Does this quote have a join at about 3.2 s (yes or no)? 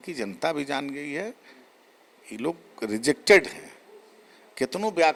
no